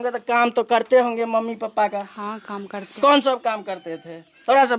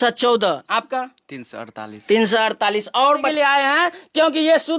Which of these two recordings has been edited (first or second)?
second